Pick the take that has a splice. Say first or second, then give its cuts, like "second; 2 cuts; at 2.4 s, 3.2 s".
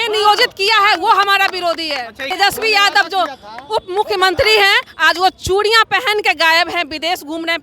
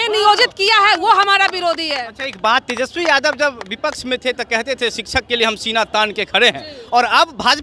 first; 1 cut; at 2.2 s